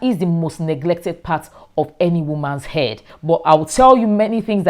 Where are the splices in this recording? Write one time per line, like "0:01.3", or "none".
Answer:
0:03.1